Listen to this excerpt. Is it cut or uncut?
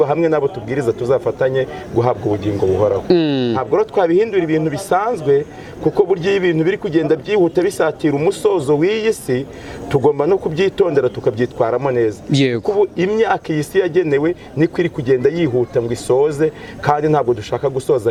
uncut